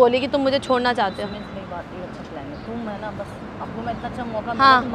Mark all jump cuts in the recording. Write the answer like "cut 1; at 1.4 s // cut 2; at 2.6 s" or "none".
none